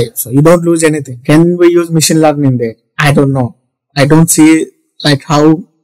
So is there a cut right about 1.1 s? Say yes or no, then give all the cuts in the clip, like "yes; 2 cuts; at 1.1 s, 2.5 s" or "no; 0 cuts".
yes; 1 cut; at 1.1 s